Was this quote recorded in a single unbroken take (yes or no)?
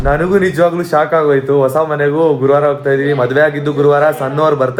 yes